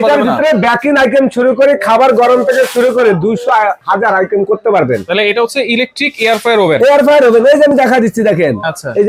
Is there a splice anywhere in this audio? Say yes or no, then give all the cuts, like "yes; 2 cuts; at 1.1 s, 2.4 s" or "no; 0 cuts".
no; 0 cuts